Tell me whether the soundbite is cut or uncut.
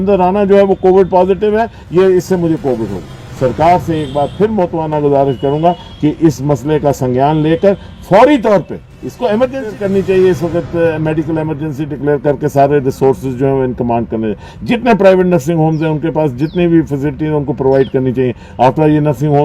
cut